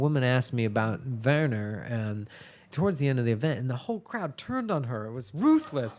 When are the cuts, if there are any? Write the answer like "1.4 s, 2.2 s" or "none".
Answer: 2.6 s